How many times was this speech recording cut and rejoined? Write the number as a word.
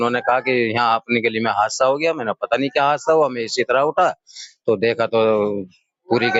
zero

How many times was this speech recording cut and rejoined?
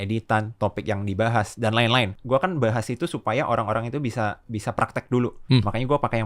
two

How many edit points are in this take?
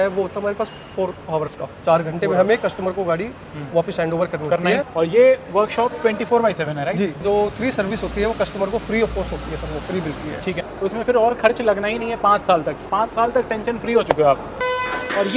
four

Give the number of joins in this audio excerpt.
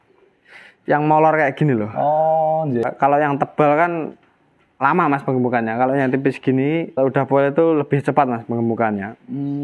two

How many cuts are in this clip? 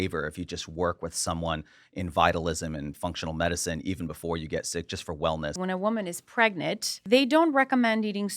two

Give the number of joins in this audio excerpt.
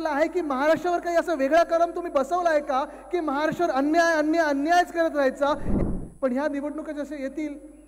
one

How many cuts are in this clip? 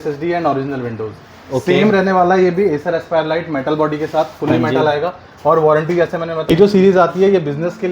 one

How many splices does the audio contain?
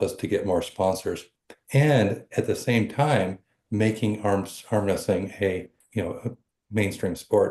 one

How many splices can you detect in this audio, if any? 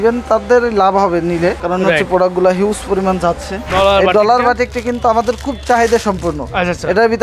two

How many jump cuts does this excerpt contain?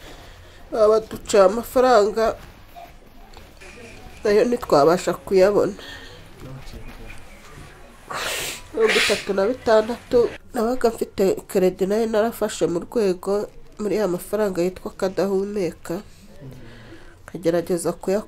one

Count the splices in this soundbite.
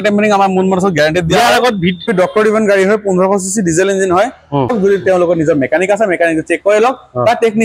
two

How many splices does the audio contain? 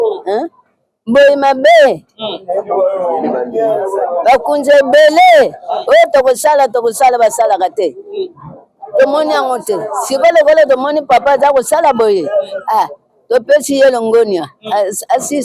zero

